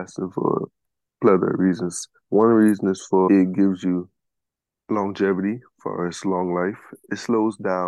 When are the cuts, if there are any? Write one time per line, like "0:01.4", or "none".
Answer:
0:03.3
0:06.9